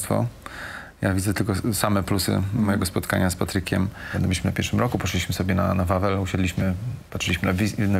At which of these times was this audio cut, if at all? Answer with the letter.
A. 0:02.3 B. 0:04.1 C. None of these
B